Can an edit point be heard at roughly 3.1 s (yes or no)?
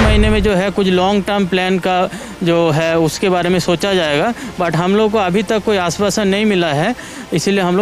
no